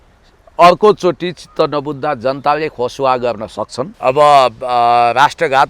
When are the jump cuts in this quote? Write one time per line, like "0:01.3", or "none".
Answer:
0:03.8